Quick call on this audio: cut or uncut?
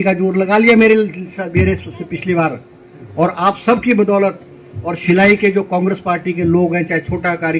uncut